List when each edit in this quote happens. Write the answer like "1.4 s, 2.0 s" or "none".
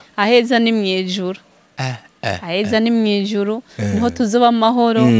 none

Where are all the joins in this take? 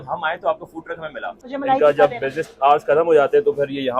1.3 s

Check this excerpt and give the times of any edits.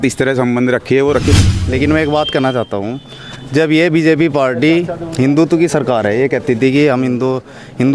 1.5 s

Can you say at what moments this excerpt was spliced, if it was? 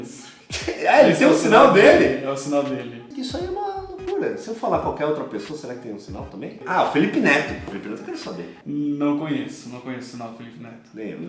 3.0 s

